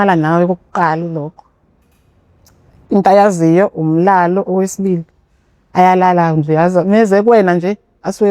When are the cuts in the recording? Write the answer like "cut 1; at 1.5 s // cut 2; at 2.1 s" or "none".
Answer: none